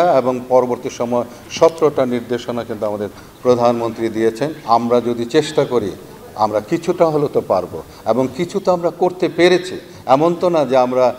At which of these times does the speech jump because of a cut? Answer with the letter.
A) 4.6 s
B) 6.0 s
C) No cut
A